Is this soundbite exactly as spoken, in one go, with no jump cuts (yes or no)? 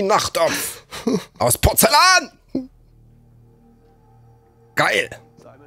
yes